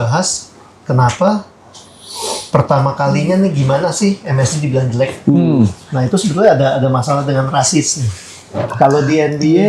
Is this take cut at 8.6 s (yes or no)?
yes